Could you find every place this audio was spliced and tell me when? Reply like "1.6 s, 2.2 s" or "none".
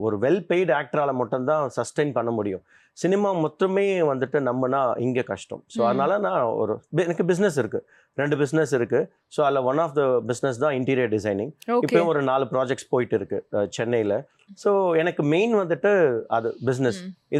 none

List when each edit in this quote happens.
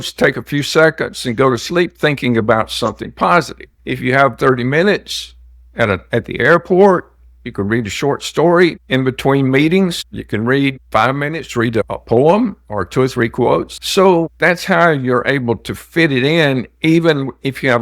none

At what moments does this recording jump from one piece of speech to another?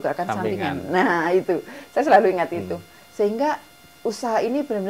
none

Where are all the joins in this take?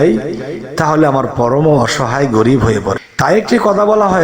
3.1 s

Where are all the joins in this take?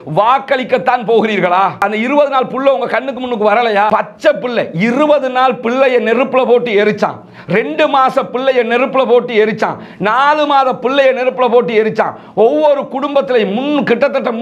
3.9 s

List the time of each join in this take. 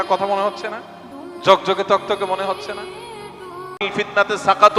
3.9 s

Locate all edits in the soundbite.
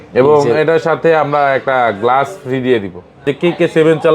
3.2 s

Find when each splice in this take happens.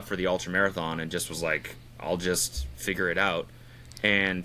none

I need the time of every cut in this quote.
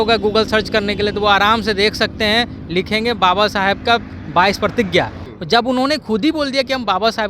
5.2 s

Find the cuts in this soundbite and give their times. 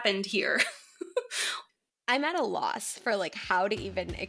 1.5 s

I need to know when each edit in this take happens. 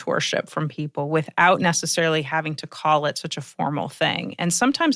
none

